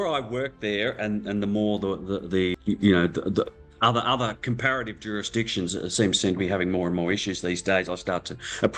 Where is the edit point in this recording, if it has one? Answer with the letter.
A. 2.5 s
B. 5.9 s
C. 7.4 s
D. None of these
A